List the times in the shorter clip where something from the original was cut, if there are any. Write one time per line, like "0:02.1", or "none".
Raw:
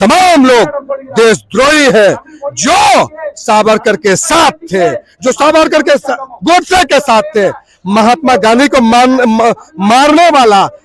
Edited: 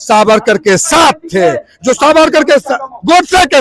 none